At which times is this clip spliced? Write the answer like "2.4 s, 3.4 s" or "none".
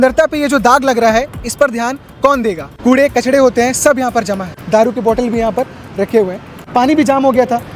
2.7 s, 4.5 s, 6.7 s